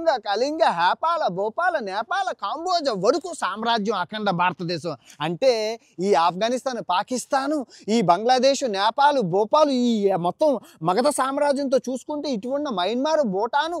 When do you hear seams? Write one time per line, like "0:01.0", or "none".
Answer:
none